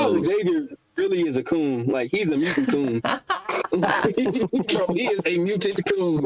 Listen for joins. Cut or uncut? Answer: uncut